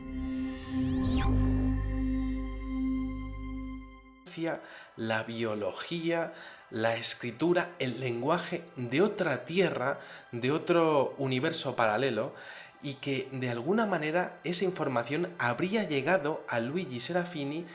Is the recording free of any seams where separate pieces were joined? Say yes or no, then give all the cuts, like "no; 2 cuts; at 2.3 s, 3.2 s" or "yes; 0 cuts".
yes; 0 cuts